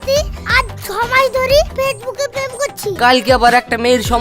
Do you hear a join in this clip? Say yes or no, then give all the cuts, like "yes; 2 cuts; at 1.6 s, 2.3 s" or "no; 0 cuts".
yes; 1 cut; at 3.0 s